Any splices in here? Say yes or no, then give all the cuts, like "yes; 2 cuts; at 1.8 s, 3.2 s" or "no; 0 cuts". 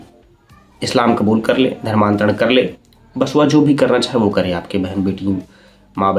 no; 0 cuts